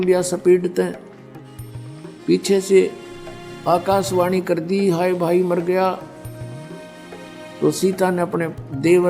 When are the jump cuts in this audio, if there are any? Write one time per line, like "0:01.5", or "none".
0:06.2
0:07.6